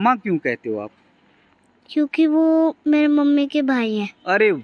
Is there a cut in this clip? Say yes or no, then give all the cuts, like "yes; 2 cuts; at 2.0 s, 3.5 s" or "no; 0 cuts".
no; 0 cuts